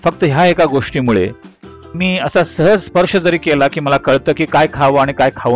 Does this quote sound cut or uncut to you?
cut